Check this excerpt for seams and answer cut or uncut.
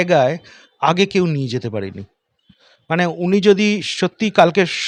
uncut